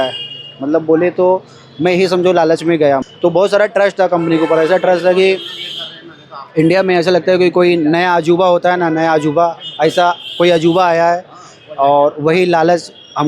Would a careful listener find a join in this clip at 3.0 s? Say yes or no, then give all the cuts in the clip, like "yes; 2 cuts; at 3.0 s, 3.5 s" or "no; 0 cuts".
yes; 1 cut; at 3.0 s